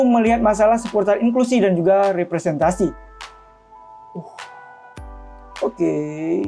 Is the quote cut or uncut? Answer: uncut